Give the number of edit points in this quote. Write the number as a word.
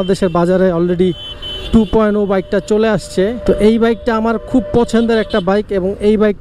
one